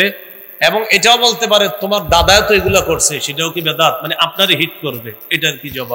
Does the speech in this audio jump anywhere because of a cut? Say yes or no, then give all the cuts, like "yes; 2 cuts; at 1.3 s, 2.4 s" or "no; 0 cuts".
no; 0 cuts